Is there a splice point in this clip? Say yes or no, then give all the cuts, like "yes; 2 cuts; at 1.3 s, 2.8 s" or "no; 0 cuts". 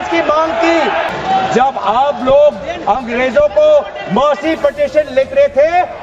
yes; 1 cut; at 1.1 s